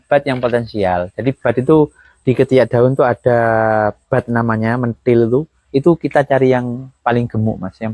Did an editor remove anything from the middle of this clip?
no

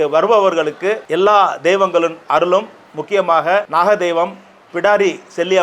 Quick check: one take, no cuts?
no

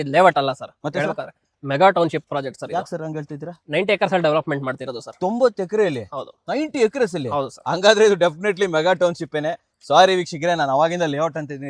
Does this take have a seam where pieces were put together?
no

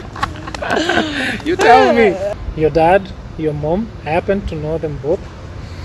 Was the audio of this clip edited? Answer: yes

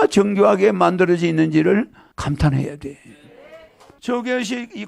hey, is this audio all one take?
no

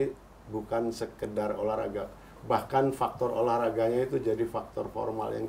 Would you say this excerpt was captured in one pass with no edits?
yes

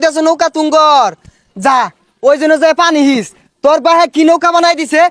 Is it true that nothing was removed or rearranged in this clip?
yes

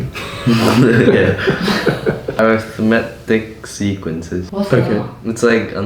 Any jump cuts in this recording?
yes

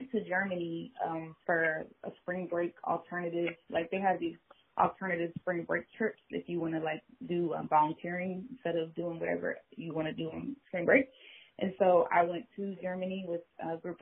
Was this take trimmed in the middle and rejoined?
no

